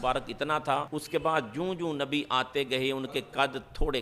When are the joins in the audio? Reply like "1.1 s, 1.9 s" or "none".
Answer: 1.0 s